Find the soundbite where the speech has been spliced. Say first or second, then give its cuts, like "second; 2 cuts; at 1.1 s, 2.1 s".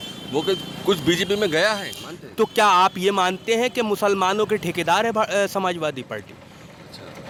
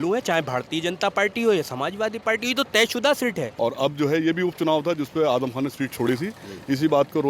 second; 1 cut; at 3.5 s